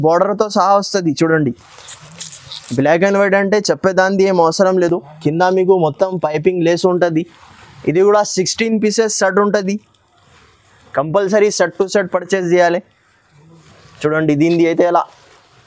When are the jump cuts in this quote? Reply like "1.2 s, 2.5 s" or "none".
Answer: none